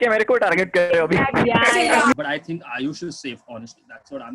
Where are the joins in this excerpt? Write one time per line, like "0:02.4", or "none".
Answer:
0:02.1